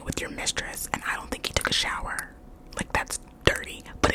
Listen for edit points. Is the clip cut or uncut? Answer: uncut